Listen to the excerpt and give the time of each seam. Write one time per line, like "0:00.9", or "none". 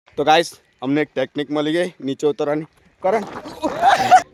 none